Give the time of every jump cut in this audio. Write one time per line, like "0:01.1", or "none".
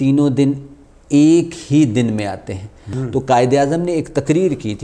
0:02.9